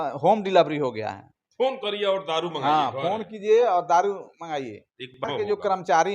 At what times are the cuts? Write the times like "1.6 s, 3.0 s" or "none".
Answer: 5.2 s